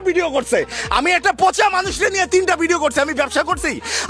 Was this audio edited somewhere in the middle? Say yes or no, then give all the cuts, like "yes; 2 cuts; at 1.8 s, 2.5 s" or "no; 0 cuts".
no; 0 cuts